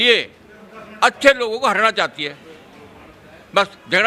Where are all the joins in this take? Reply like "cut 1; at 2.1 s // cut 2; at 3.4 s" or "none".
none